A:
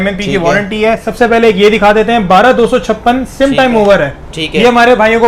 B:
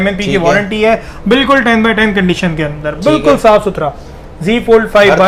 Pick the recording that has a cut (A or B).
A